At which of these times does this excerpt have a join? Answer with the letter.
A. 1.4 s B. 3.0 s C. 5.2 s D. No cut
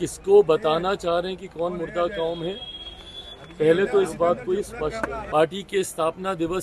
C